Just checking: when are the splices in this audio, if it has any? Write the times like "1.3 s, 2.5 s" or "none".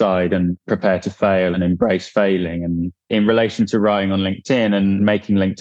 1.5 s, 2.9 s